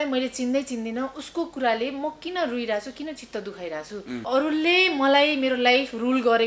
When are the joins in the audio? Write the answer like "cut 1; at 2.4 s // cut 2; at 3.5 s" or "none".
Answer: cut 1; at 4.2 s